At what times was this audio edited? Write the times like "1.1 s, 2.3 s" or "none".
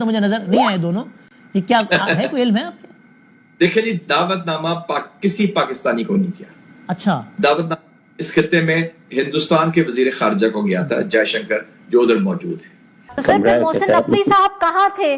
13.1 s